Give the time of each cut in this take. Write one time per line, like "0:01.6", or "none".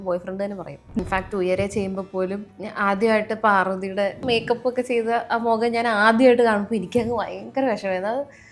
0:01.0
0:02.5
0:04.2